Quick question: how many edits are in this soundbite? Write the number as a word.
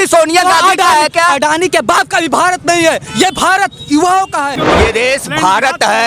one